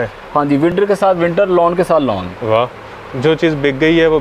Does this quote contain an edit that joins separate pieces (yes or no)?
no